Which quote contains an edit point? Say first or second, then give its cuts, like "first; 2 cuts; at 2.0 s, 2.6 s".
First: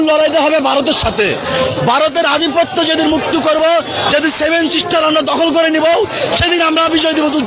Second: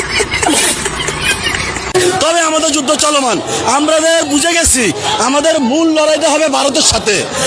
second; 1 cut; at 1.9 s